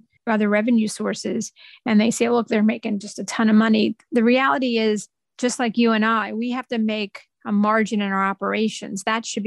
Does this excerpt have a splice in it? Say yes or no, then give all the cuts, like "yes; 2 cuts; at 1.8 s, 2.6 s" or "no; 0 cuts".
no; 0 cuts